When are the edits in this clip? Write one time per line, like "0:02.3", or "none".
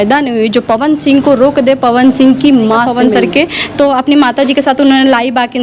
0:02.9